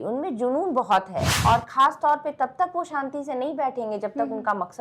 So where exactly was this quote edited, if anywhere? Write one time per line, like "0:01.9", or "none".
0:01.3